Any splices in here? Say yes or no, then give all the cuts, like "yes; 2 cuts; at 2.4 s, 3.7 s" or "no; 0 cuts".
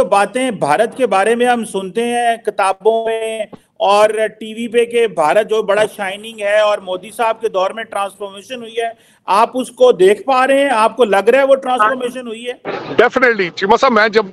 yes; 1 cut; at 12.5 s